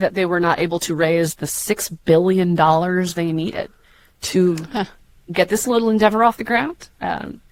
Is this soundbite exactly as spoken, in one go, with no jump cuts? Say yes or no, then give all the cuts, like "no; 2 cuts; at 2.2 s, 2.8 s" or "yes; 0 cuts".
yes; 0 cuts